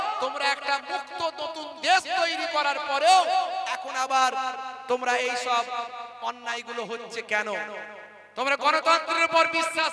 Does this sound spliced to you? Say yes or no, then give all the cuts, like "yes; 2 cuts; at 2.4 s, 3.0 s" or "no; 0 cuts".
no; 0 cuts